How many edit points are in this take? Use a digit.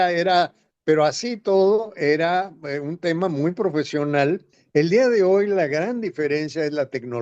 1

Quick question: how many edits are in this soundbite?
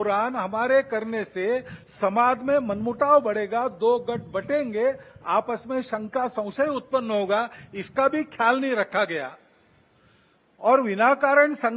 0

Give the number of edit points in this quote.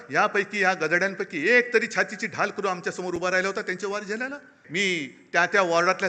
1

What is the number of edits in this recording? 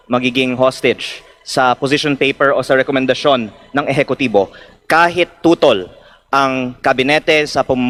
0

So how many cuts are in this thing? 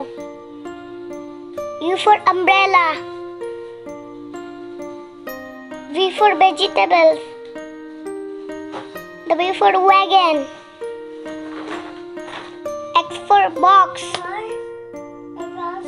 0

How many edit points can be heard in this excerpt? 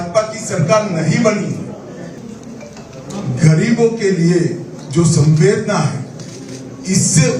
1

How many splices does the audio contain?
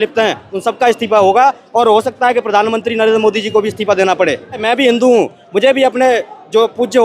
1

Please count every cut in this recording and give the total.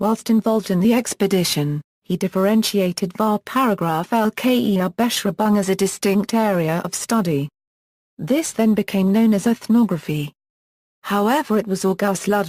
0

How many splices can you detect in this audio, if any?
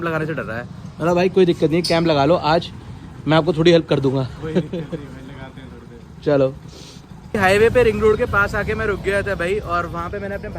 1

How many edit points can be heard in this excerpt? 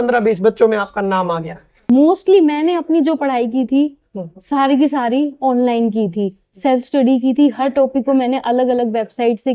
1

